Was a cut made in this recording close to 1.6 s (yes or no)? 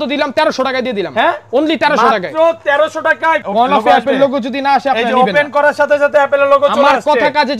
no